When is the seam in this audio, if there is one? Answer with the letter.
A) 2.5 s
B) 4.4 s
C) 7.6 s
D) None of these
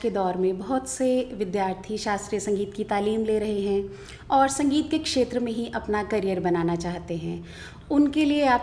D